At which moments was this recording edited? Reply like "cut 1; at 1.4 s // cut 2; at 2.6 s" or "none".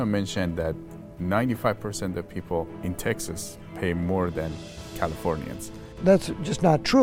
cut 1; at 2.7 s // cut 2; at 6.0 s